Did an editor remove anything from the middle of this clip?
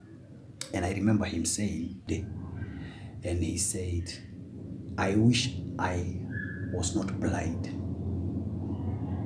yes; 1 cut; at 2.1 s

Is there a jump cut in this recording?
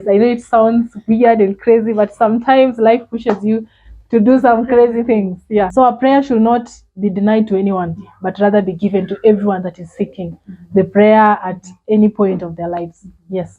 yes; 1 cut; at 5.7 s

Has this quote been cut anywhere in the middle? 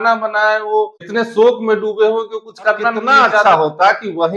yes; 2 cuts; at 1.0 s, 3.4 s

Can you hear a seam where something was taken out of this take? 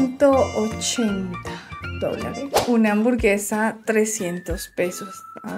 yes; 1 cut; at 2.6 s

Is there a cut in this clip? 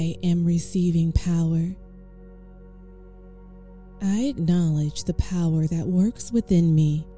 yes; 2 cuts; at 1.8 s, 4.0 s

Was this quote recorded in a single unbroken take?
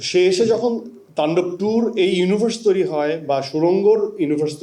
yes; 0 cuts

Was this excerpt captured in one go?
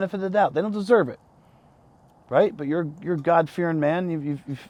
yes; 0 cuts

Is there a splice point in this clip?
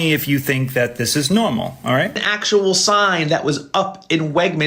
yes; 1 cut; at 2.3 s

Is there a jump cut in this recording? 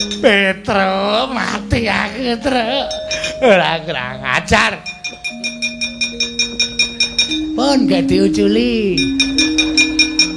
no; 0 cuts

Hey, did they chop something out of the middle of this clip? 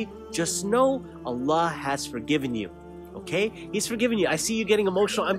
no; 0 cuts

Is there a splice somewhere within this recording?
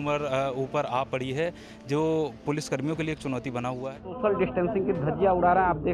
yes; 1 cut; at 4.1 s

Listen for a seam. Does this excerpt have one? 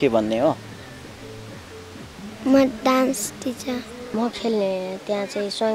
yes; 1 cut; at 4.1 s

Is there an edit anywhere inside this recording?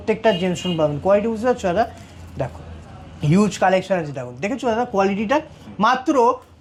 no; 0 cuts

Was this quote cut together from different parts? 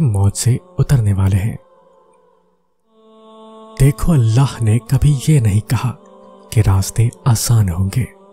yes; 2 cuts; at 1.6 s, 3.1 s

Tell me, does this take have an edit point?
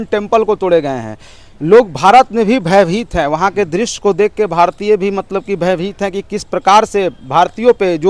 no; 0 cuts

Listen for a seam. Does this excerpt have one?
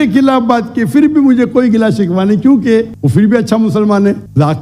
no; 0 cuts

